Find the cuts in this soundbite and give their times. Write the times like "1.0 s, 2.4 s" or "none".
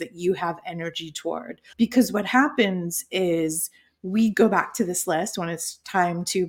1.6 s